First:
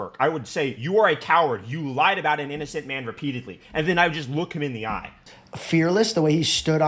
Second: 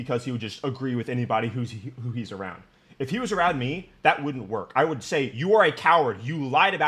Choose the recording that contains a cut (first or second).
first